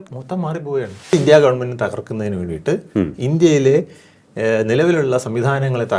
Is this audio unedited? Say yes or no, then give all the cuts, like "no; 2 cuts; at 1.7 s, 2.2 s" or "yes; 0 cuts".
no; 1 cut; at 1.1 s